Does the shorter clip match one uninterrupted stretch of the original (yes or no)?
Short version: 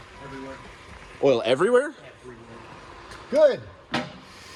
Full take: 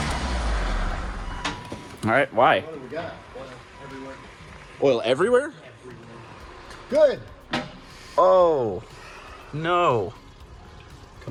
yes